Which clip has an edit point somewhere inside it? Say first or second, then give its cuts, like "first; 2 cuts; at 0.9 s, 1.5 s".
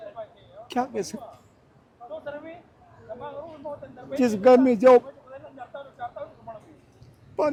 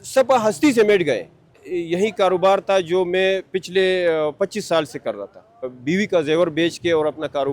second; 2 cuts; at 1.7 s, 5.7 s